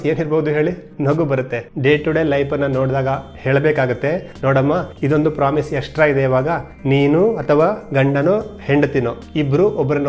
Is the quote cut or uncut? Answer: cut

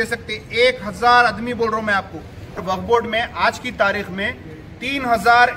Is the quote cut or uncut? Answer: cut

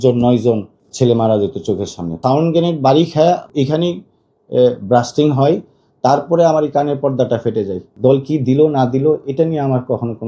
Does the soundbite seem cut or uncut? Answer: cut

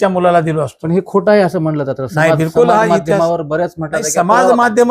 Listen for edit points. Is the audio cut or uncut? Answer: uncut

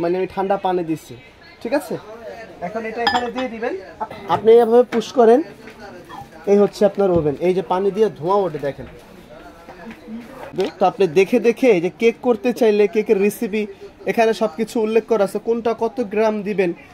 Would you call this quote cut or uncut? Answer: cut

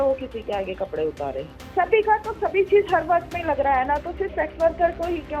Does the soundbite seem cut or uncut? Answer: cut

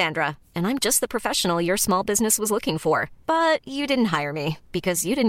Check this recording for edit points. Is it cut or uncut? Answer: uncut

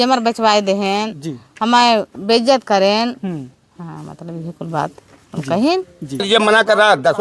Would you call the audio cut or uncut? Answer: cut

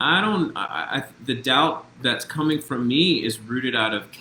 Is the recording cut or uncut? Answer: uncut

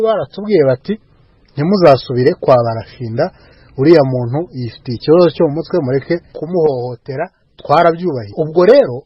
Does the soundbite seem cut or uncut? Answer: uncut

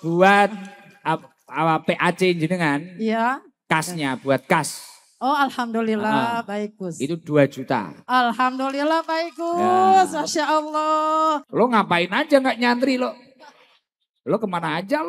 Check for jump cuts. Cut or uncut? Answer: cut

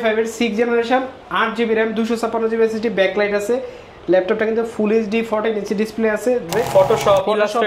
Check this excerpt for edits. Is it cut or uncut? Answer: cut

